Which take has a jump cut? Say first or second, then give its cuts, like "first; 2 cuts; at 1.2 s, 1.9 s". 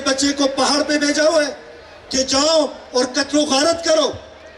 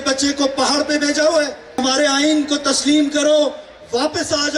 second; 1 cut; at 1.8 s